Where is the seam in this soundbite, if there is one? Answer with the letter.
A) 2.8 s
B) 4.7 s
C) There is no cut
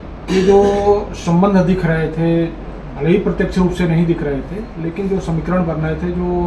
C